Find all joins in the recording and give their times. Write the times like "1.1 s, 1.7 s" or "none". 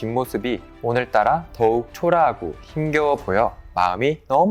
none